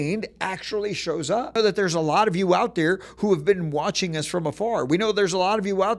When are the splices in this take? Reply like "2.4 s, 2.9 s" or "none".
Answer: 1.6 s